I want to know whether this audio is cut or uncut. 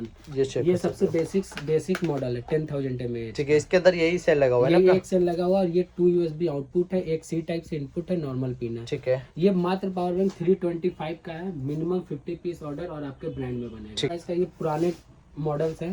cut